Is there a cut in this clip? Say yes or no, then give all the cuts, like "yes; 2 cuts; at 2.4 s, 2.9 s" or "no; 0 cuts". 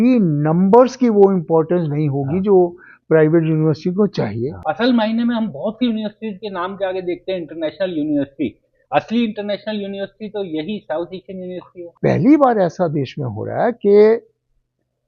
yes; 2 cuts; at 4.6 s, 11.9 s